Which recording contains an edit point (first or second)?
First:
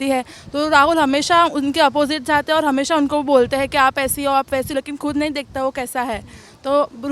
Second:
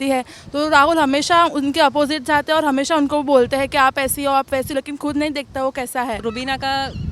second